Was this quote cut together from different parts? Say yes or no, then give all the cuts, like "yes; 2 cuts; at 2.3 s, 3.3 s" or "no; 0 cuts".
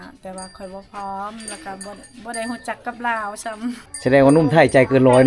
yes; 1 cut; at 3.9 s